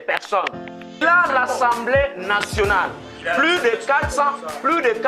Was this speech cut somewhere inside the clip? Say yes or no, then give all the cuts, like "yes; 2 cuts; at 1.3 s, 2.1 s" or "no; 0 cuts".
yes; 1 cut; at 1.0 s